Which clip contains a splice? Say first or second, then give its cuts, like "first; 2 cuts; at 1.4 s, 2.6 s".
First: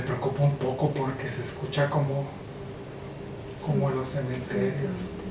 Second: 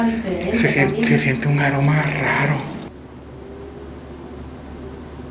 second; 1 cut; at 2.9 s